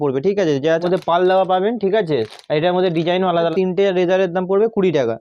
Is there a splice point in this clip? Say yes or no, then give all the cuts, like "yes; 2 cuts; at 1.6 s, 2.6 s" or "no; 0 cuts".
yes; 2 cuts; at 0.8 s, 3.5 s